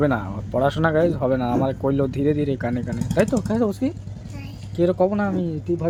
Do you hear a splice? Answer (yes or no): no